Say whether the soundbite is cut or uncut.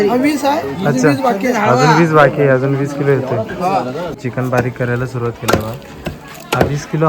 cut